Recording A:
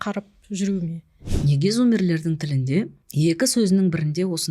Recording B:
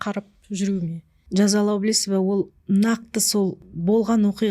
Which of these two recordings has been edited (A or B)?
A